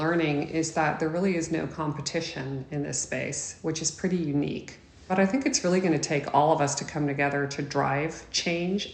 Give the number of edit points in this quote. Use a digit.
1